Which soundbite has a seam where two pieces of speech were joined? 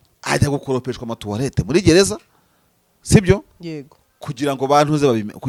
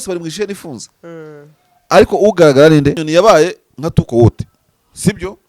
second; 1 cut; at 3.0 s

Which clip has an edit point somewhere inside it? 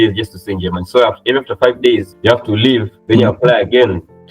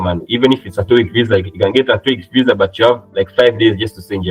first; 2 cuts; at 2.1 s, 2.9 s

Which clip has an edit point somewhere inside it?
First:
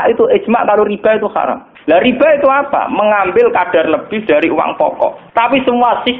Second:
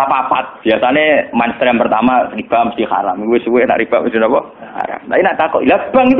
first; 1 cut; at 1.7 s

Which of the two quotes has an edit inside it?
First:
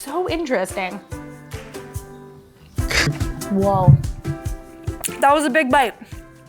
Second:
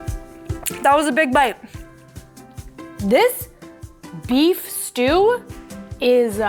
first; 1 cut; at 3.1 s

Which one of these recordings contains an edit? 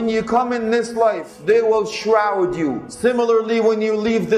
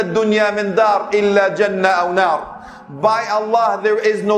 first; 2 cuts; at 1.3 s, 2.9 s

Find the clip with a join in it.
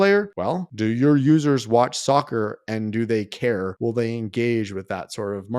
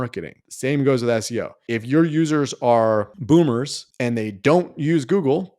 first; 1 cut; at 3.7 s

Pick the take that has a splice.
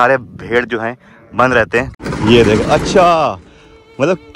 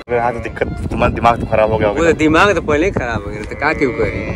first; 1 cut; at 2.0 s

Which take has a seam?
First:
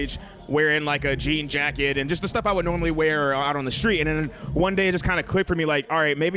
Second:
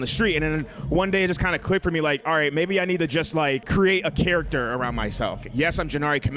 second; 2 cuts; at 3.6 s, 5.4 s

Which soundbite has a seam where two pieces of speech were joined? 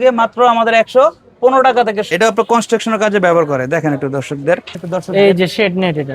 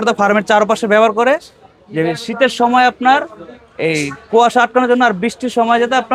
first; 2 cuts; at 2.1 s, 4.8 s

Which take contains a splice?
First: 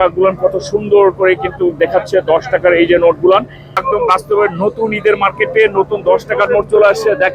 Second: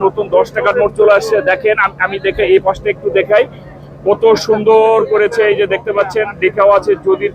first; 1 cut; at 3.8 s

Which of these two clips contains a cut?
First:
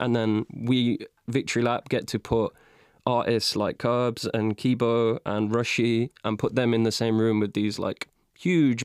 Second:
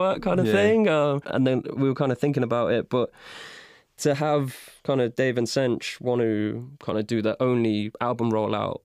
second; 1 cut; at 7.9 s

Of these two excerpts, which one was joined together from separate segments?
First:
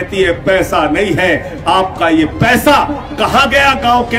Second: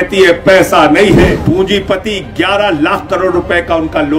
second; 1 cut; at 1.2 s

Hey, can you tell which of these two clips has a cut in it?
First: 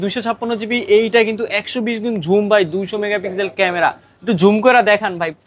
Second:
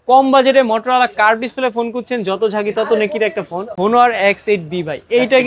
second; 1 cut; at 3.8 s

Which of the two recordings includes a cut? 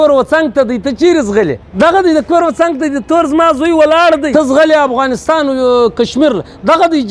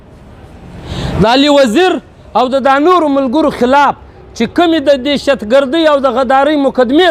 first; 2 cuts; at 1.6 s, 4.3 s

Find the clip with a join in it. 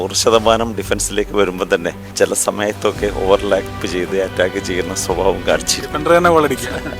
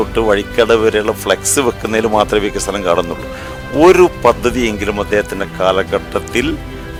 first; 1 cut; at 2.0 s

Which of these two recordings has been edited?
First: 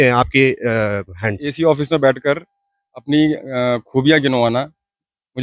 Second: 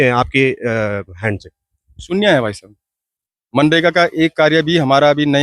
first; 1 cut; at 1.5 s

